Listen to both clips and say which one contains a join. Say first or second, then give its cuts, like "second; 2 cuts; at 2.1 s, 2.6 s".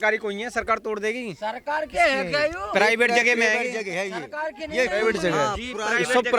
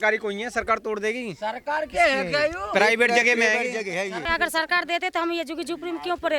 second; 1 cut; at 4.3 s